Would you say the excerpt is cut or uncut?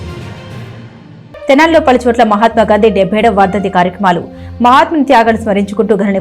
cut